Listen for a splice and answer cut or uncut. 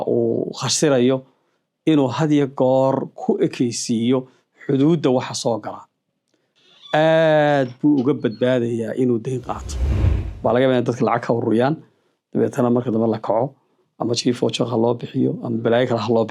cut